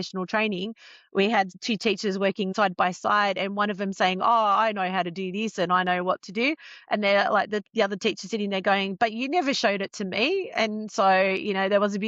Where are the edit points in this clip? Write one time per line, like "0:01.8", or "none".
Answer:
0:02.5